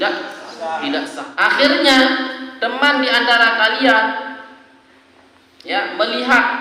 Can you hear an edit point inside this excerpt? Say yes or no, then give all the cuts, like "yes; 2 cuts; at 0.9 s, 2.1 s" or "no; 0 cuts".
yes; 1 cut; at 1.1 s